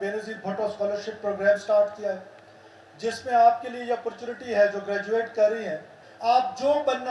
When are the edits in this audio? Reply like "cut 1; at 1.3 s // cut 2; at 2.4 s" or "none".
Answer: cut 1; at 6.0 s